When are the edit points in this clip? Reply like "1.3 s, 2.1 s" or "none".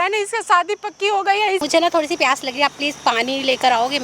1.6 s